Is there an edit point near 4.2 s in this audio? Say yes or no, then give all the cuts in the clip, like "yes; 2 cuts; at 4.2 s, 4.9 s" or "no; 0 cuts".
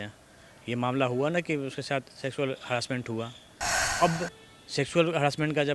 no; 0 cuts